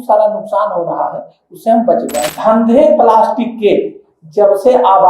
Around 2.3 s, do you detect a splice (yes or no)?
yes